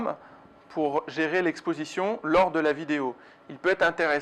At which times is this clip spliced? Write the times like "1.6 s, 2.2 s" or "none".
2.7 s